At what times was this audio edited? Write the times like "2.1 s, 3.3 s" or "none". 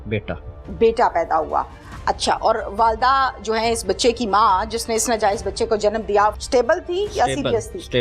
6.4 s